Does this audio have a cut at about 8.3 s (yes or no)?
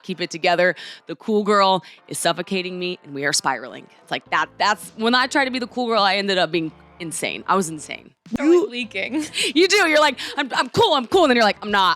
yes